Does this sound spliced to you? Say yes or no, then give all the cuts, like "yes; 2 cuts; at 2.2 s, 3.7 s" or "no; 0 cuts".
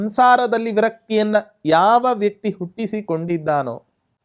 no; 0 cuts